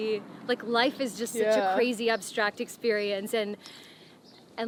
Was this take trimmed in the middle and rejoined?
no; 0 cuts

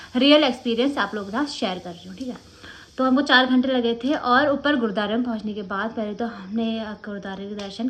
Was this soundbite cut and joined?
no; 0 cuts

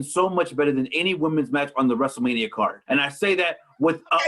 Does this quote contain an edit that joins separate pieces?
yes; 1 cut; at 2.8 s

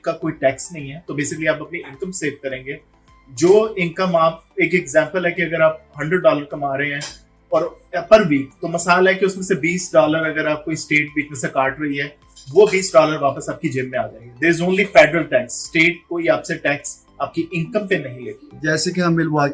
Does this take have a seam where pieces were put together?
no; 0 cuts

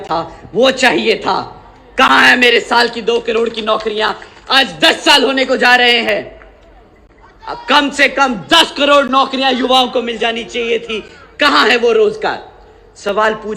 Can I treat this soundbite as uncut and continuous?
yes; 0 cuts

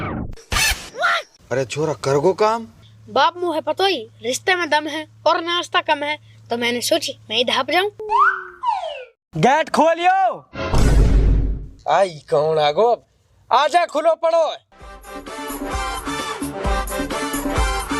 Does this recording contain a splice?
yes; 1 cut; at 9.2 s

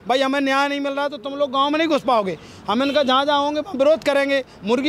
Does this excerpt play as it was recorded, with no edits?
yes; 0 cuts

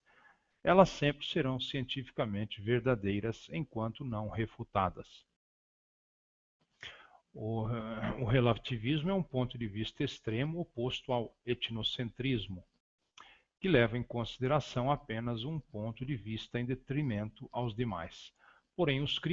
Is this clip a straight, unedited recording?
yes; 0 cuts

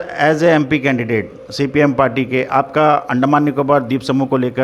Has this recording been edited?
no; 0 cuts

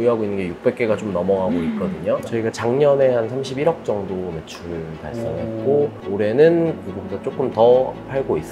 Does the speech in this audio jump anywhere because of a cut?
yes; 2 cuts; at 2.2 s, 6.0 s

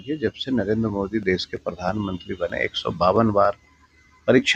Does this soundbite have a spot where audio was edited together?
no; 0 cuts

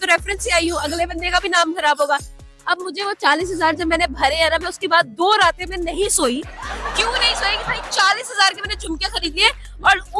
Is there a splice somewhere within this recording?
no; 0 cuts

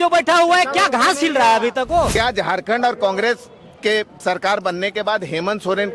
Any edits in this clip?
yes; 1 cut; at 2.1 s

